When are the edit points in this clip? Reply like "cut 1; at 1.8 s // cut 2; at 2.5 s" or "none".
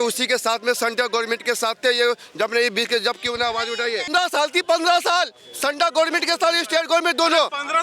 cut 1; at 4.1 s